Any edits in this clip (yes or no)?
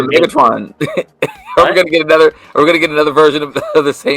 no